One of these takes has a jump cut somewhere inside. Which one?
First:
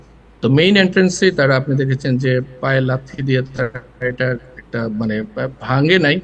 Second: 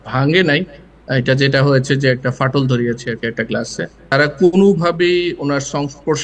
second; 1 cut; at 4.1 s

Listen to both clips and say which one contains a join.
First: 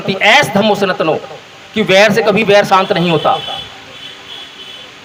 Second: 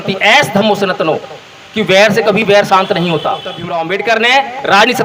second; 1 cut; at 3.6 s

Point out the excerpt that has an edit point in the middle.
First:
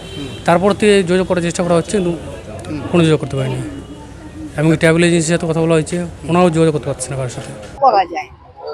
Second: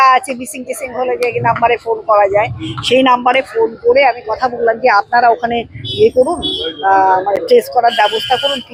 first; 1 cut; at 7.8 s

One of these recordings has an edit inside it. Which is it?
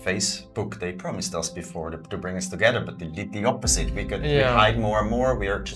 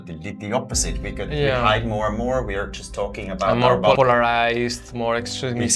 second; 1 cut; at 4.0 s

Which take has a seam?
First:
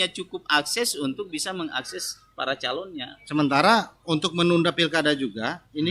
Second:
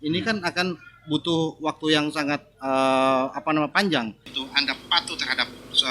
second; 1 cut; at 4.2 s

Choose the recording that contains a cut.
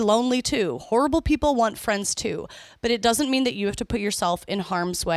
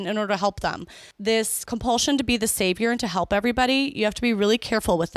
second; 1 cut; at 1.3 s

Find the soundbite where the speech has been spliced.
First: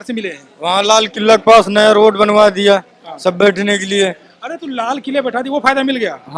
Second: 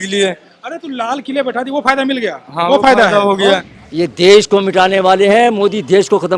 second; 1 cut; at 3.8 s

